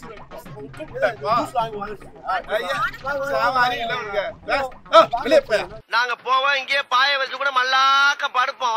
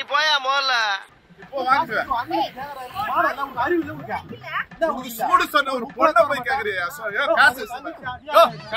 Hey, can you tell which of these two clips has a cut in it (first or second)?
second